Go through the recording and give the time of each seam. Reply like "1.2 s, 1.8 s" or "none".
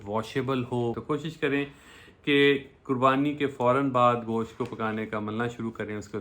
1.0 s